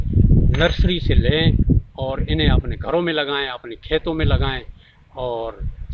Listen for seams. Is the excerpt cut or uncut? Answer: uncut